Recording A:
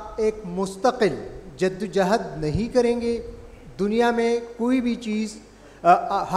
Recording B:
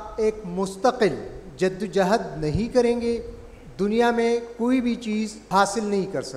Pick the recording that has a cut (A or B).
B